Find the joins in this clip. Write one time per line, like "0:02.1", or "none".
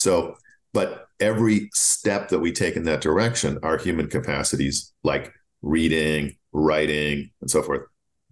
none

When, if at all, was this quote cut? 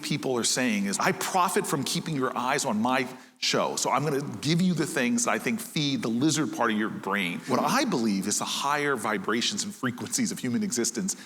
0:00.9
0:07.5

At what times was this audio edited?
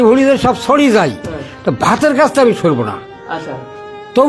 none

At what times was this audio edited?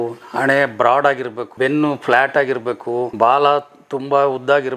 none

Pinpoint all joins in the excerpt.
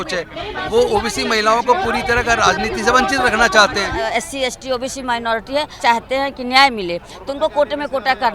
0:04.0
0:05.8

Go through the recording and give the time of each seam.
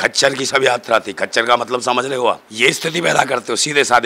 0:02.5

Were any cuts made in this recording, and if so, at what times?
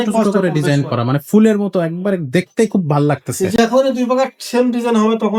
none

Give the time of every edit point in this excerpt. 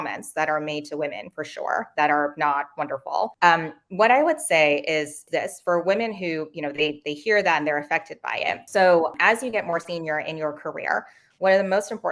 none

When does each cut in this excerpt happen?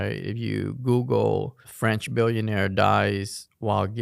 0:01.6

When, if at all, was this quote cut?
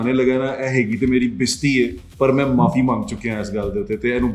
none

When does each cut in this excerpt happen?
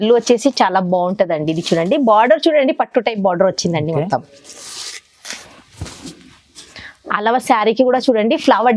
none

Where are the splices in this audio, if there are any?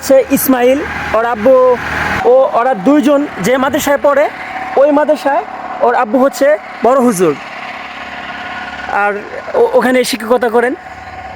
0:02.1

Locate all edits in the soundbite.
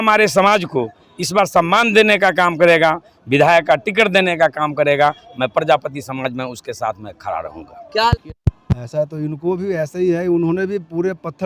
0:08.1

